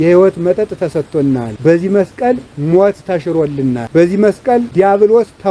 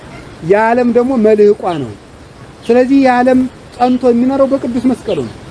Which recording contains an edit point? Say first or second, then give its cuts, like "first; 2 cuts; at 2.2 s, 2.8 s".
first; 3 cuts; at 1.5 s, 3.8 s, 4.7 s